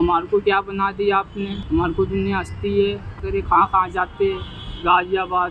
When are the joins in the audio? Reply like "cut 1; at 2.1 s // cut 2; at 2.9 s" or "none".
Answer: cut 1; at 1.6 s // cut 2; at 3.2 s